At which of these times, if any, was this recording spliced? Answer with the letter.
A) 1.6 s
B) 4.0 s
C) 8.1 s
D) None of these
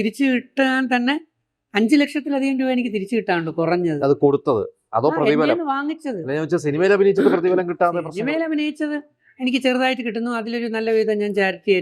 D